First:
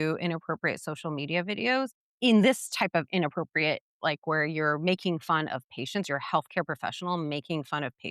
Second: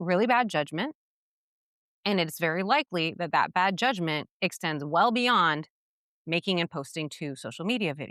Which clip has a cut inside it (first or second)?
first